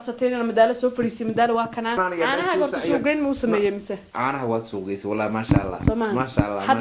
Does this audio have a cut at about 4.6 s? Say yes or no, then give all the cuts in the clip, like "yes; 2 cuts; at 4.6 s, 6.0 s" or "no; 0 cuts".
no; 1 cut; at 2.0 s